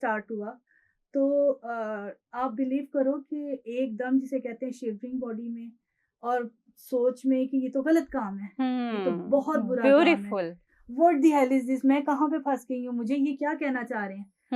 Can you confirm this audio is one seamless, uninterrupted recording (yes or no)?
yes